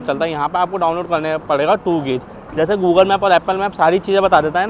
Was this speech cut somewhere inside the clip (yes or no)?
no